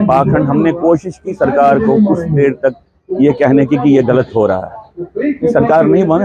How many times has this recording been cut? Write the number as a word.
zero